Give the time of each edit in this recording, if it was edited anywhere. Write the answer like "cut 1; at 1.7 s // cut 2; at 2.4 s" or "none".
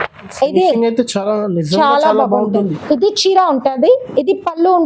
cut 1; at 2.6 s